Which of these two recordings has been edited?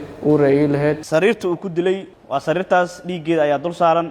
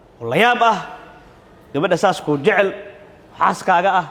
first; 2 cuts; at 1.0 s, 2.1 s

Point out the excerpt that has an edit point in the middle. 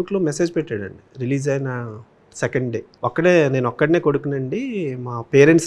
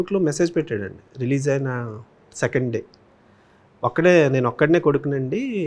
first; 1 cut; at 2.9 s

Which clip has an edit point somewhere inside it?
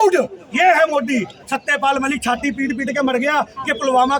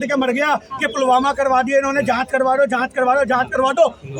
first; 1 cut; at 1.4 s

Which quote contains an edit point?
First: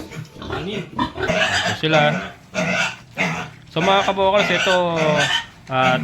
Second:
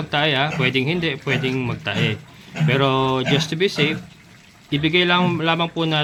first; 1 cut; at 1.3 s

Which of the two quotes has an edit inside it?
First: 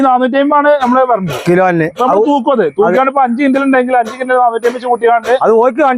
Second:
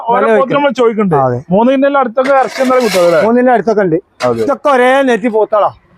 second; 1 cut; at 4.4 s

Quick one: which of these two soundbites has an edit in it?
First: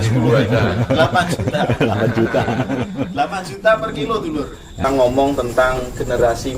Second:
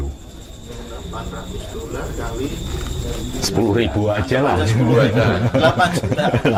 first; 1 cut; at 4.8 s

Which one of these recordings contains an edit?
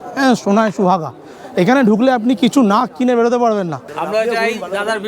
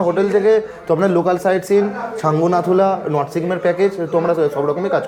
first; 1 cut; at 3.8 s

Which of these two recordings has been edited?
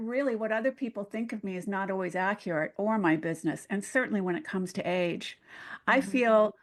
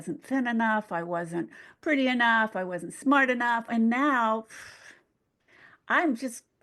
second; 1 cut; at 3.7 s

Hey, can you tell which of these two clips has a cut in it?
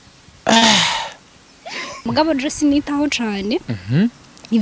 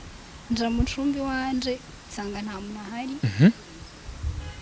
first; 1 cut; at 2.0 s

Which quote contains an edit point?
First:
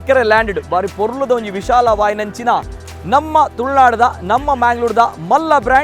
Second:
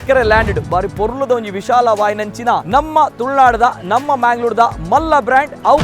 second; 1 cut; at 2.6 s

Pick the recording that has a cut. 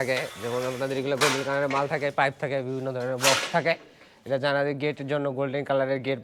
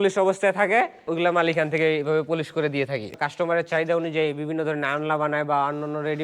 second; 2 cuts; at 1.1 s, 3.1 s

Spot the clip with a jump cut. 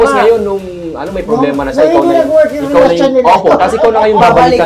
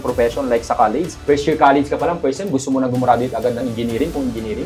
second; 1 cut; at 1.1 s

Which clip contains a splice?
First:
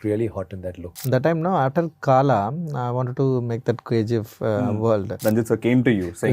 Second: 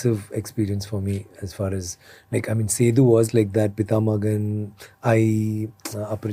first; 2 cuts; at 0.9 s, 5.1 s

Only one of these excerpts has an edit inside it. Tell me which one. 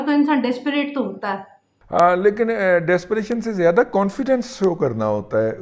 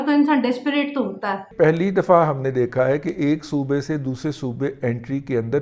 second; 1 cut; at 1.5 s

